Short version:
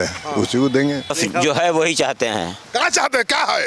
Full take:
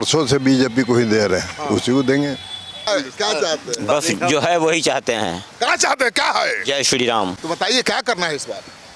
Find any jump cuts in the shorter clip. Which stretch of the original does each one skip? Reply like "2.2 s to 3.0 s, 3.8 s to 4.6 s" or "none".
2.5 s to 4.0 s